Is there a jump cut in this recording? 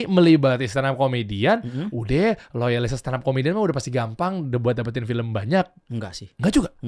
no; 0 cuts

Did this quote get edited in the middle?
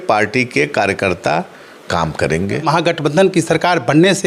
yes; 1 cut; at 2.6 s

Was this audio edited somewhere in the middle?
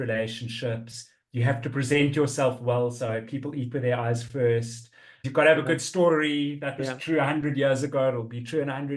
yes; 1 cut; at 5.3 s

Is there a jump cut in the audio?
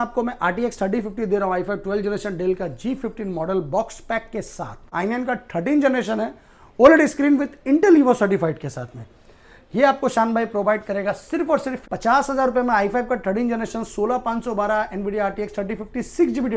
yes; 2 cuts; at 4.9 s, 11.8 s

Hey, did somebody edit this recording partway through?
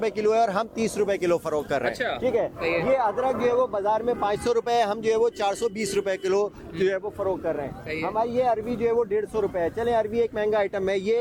no; 0 cuts

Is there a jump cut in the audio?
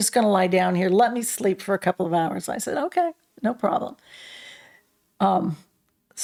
no; 0 cuts

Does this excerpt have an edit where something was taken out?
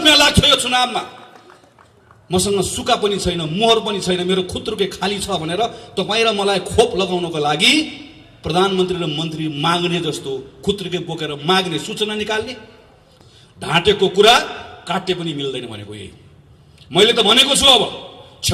yes; 1 cut; at 13.0 s

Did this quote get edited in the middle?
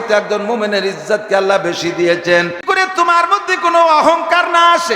yes; 1 cut; at 2.6 s

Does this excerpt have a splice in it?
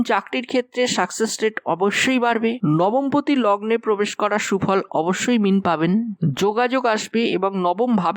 no; 0 cuts

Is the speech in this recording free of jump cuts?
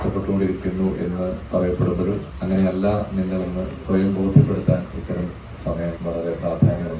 no; 4 cuts; at 1.4 s, 2.3 s, 3.7 s, 6.0 s

